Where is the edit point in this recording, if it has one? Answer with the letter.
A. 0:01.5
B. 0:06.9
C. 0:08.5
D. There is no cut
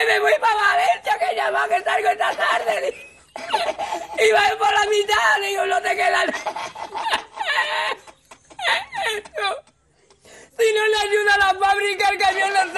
B